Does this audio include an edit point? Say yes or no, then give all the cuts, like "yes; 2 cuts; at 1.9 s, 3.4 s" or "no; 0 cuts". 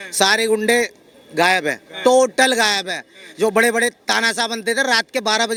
no; 0 cuts